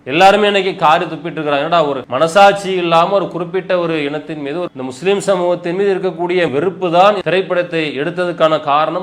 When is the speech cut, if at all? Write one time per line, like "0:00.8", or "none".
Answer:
none